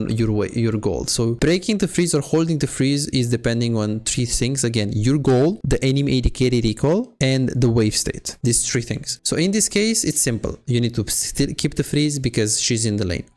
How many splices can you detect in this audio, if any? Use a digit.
4